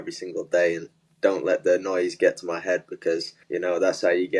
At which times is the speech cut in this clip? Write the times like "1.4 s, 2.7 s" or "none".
3.4 s